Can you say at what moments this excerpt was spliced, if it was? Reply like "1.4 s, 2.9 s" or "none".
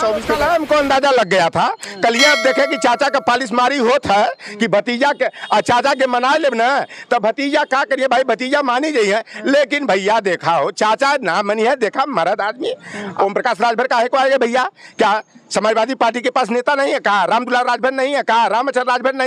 13.1 s